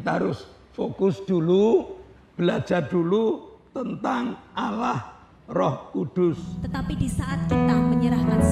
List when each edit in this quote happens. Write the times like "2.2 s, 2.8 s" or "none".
6.6 s

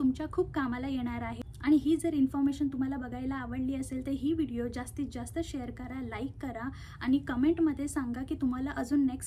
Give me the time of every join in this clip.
none

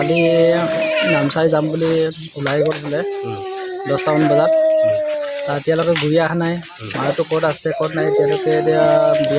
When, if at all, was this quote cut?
none

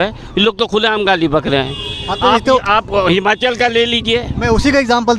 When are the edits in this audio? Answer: none

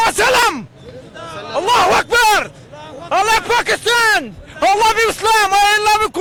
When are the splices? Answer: none

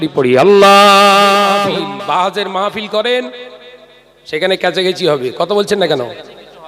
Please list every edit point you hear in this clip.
1.6 s

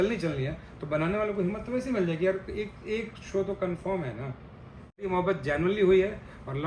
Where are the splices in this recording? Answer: 5.1 s

